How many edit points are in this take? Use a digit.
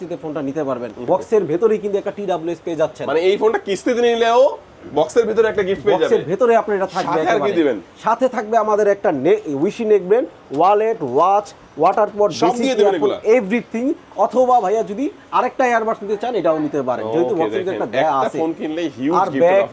1